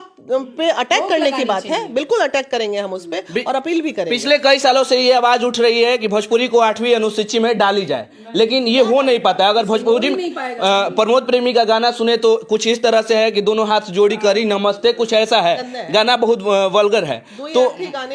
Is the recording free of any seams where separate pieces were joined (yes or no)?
yes